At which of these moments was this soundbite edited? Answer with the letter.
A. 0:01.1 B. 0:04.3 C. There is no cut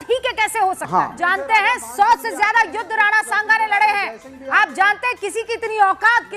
A